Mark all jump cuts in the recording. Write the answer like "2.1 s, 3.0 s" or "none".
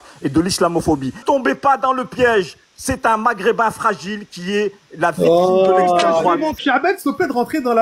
1.2 s, 6.6 s

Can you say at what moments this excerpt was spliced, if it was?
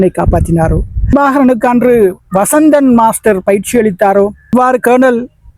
1.1 s, 4.5 s

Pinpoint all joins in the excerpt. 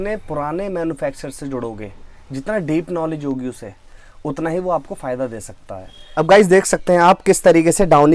6.0 s

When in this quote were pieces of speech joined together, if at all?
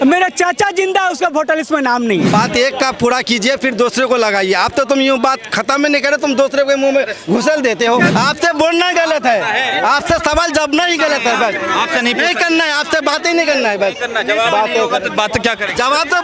2.3 s, 8.1 s

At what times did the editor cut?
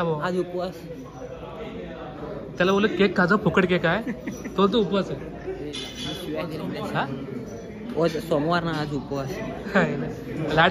none

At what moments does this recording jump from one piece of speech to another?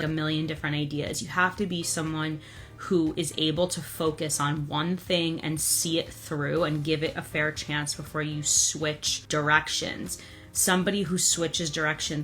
9.1 s

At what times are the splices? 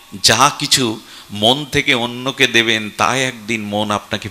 none

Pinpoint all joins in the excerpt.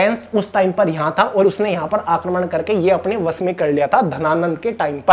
none

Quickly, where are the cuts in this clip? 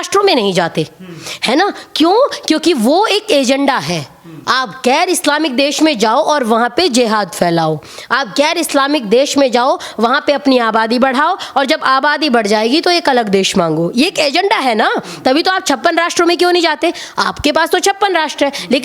none

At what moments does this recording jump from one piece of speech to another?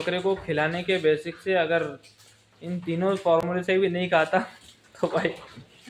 none

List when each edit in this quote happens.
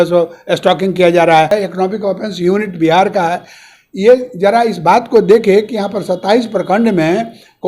1.5 s

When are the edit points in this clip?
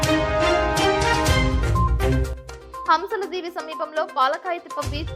2.3 s

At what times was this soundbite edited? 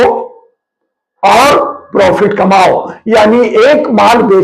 none

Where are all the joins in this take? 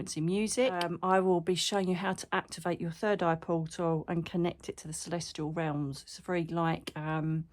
0.9 s

